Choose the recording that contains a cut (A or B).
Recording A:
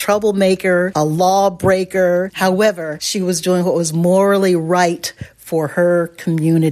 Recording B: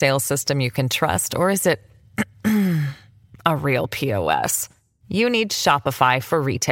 A